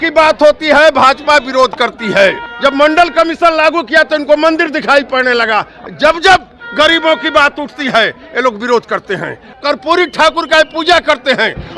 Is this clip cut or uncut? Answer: cut